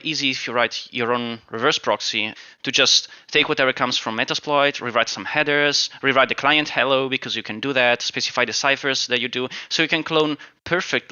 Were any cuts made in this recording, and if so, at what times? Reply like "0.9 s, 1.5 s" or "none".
none